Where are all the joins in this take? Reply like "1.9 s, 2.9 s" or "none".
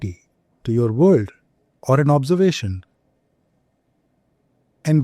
none